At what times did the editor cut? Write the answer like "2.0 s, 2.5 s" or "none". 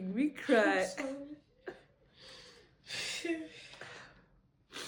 none